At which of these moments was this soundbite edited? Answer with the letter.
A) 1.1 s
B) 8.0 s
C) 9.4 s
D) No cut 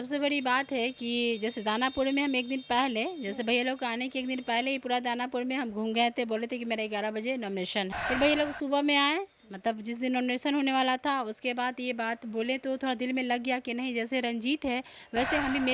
B